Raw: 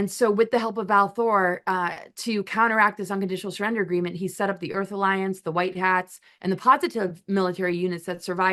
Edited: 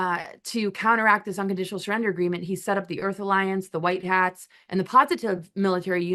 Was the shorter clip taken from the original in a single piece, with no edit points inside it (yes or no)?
yes